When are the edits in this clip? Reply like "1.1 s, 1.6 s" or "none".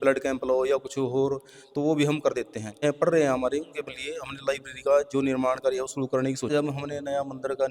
2.8 s, 6.5 s